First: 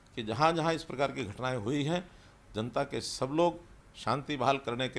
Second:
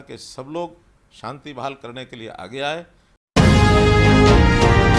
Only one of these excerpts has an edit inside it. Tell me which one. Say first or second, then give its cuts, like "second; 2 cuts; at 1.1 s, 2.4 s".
second; 1 cut; at 3.2 s